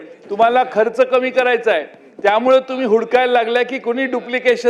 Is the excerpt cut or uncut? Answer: uncut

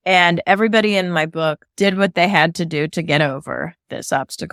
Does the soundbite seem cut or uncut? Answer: uncut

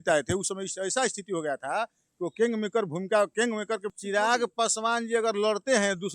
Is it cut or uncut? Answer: cut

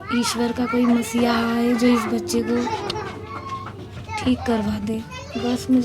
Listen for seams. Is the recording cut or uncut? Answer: uncut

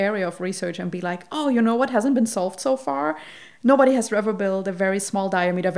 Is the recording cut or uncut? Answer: uncut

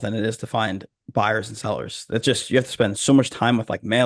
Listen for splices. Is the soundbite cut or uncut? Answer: uncut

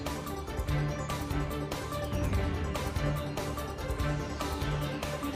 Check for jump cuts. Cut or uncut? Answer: uncut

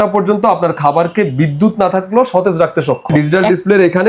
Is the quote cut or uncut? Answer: cut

